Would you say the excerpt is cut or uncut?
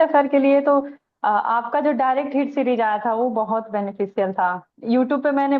uncut